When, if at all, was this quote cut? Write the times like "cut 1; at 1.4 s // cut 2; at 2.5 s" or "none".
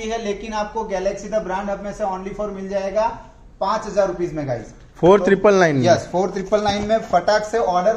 none

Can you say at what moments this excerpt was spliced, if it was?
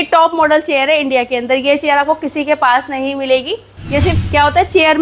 cut 1; at 4.1 s

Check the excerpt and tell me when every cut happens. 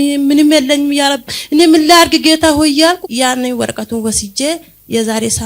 cut 1; at 3.1 s

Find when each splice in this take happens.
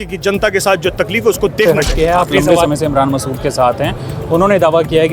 cut 1; at 1.7 s

